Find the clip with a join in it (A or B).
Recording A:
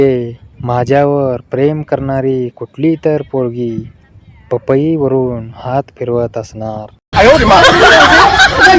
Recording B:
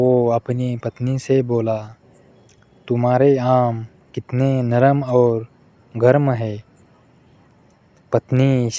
A